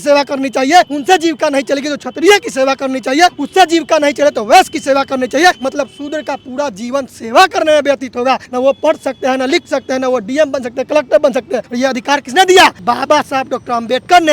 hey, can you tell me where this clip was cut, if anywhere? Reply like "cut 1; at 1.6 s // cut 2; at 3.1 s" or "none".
cut 1; at 0.9 s // cut 2; at 3.4 s // cut 3; at 5.6 s // cut 4; at 8.5 s // cut 5; at 11.6 s // cut 6; at 12.8 s